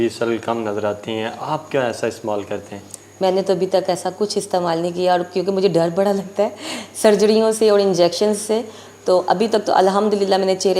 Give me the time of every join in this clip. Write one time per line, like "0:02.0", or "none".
none

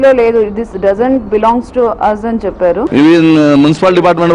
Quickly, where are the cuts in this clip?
0:02.9

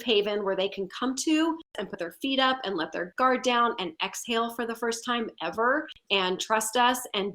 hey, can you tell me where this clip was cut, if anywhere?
0:01.8
0:06.0

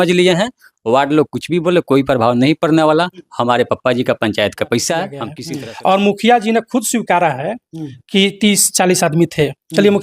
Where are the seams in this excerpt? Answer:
0:05.3

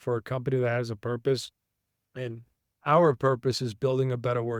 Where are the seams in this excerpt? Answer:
none

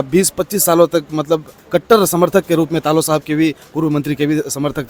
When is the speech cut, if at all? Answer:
none

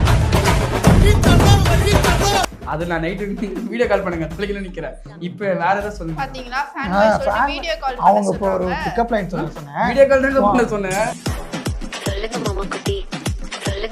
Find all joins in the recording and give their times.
none

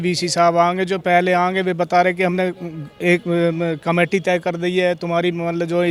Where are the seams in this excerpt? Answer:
none

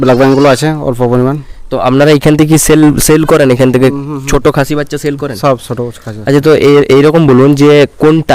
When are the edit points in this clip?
none

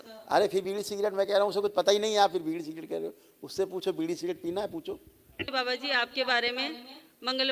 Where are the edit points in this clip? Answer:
0:05.5

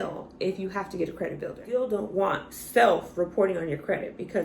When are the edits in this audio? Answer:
0:01.6

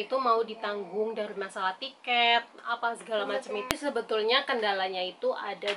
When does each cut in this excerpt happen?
0:03.8

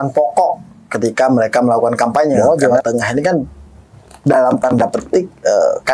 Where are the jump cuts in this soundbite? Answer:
0:02.6

